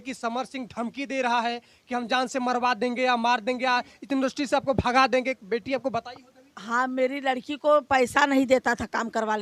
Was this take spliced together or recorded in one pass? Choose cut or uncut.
uncut